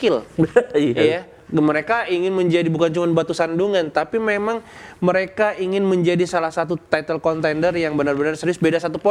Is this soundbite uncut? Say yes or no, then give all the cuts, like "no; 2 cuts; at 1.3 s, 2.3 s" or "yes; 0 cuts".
yes; 0 cuts